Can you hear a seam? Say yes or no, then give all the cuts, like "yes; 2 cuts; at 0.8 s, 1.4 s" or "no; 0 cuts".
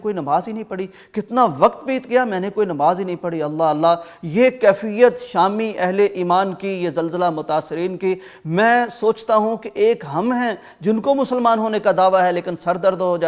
no; 0 cuts